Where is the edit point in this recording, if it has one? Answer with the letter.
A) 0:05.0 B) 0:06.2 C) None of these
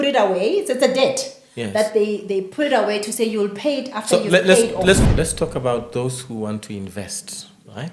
A